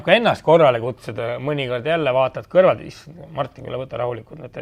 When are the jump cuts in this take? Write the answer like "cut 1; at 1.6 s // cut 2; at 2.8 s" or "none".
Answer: none

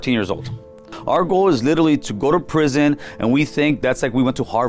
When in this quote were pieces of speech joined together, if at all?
cut 1; at 0.9 s // cut 2; at 3.8 s

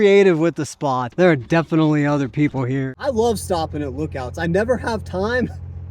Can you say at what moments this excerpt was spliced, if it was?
cut 1; at 1.1 s // cut 2; at 2.9 s

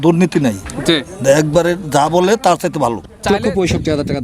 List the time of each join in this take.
cut 1; at 3.2 s

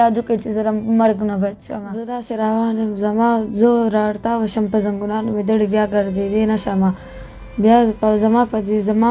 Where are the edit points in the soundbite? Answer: cut 1; at 2.1 s

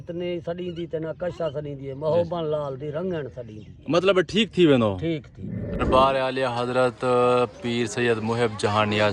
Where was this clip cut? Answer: cut 1; at 5.7 s

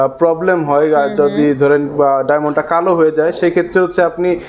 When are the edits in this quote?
none

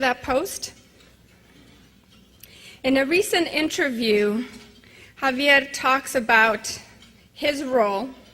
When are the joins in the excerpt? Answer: cut 1; at 3.6 s

